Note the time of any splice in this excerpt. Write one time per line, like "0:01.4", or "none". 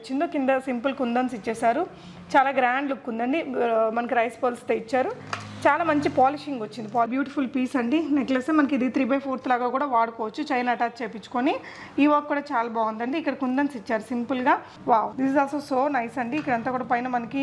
0:07.1
0:14.9